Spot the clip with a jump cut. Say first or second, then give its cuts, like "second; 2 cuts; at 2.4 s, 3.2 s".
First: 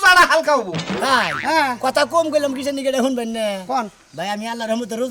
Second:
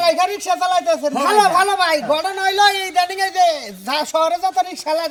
first; 1 cut; at 1.0 s